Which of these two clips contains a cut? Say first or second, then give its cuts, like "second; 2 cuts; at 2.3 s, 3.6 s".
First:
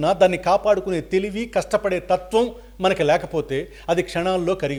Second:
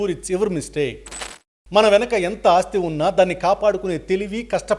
second; 1 cut; at 1.5 s